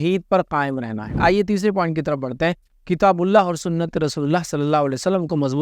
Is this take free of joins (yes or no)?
no